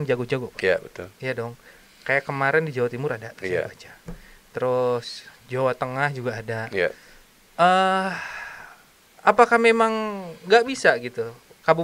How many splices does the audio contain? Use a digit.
0